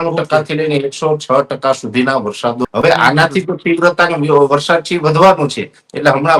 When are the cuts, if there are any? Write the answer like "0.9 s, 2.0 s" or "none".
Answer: 2.6 s